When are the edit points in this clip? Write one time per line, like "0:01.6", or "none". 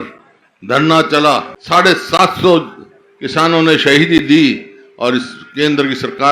0:01.5